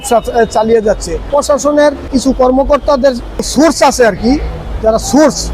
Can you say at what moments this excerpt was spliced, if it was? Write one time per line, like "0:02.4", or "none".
0:01.2
0:02.1
0:03.5